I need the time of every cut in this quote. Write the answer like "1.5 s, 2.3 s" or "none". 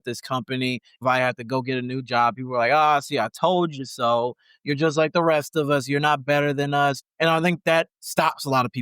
1.0 s, 7.0 s